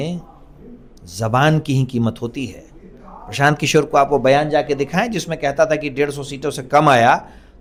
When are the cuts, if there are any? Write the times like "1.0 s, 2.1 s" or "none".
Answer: none